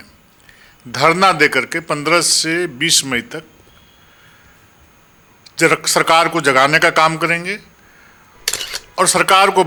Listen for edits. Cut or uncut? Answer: uncut